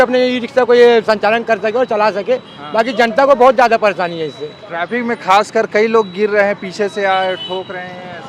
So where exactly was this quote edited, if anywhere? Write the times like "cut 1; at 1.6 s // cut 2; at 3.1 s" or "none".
none

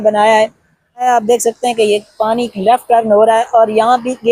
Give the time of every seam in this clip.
cut 1; at 1.0 s

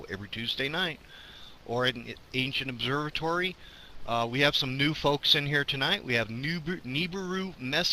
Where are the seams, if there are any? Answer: cut 1; at 2.6 s

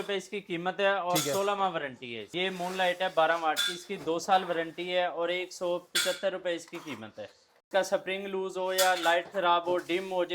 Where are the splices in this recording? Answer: cut 1; at 2.4 s // cut 2; at 7.6 s

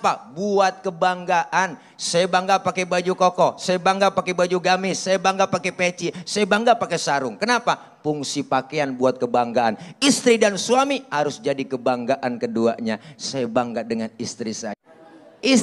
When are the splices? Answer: cut 1; at 14.7 s

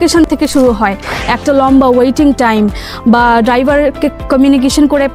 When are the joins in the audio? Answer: cut 1; at 4.1 s

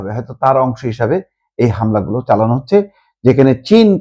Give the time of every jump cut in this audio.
none

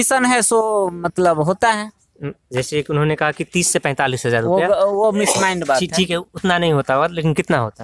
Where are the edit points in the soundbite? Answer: none

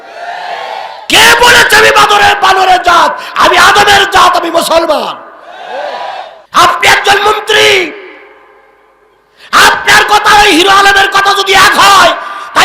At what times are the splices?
cut 1; at 6.4 s

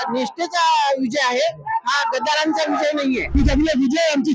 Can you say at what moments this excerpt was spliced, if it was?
cut 1; at 3.4 s

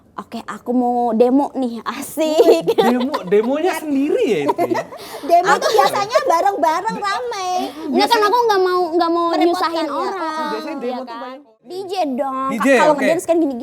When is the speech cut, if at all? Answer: cut 1; at 11.8 s

